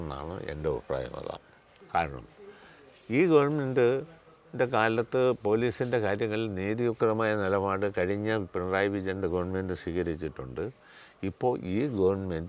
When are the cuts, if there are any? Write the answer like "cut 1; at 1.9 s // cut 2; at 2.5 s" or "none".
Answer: none